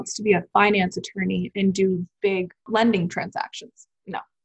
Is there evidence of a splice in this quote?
yes; 1 cut; at 2.6 s

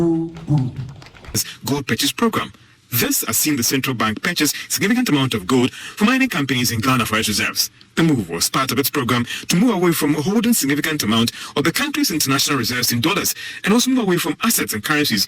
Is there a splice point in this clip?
yes; 1 cut; at 1.4 s

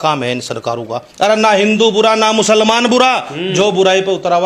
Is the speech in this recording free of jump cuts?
no; 1 cut; at 1.0 s

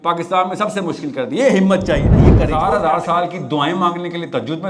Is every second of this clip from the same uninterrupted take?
no; 1 cut; at 2.4 s

